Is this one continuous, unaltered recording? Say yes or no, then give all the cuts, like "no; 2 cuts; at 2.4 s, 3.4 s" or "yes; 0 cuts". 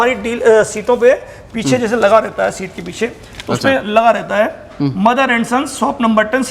yes; 0 cuts